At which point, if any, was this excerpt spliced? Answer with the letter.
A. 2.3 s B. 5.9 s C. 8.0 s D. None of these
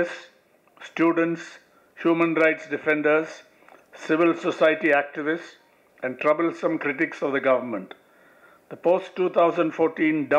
D